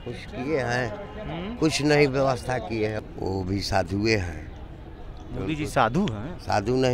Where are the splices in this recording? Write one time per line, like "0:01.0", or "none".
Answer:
0:03.0